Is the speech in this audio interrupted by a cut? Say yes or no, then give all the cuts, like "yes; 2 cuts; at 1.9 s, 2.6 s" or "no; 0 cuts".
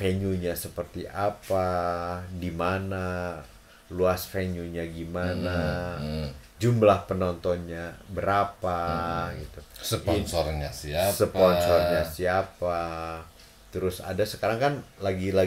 no; 0 cuts